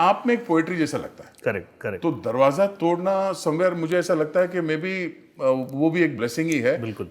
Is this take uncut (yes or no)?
yes